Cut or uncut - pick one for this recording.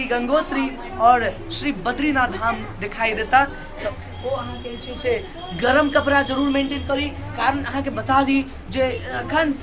cut